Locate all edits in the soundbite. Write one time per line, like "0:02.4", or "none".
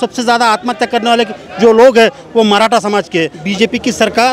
0:03.4